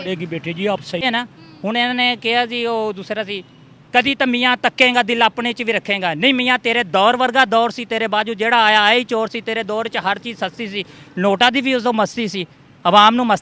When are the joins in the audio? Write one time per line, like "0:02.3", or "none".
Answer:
0:01.0